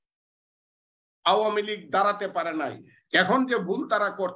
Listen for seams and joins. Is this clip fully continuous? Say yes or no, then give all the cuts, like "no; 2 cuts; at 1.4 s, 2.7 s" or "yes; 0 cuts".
yes; 0 cuts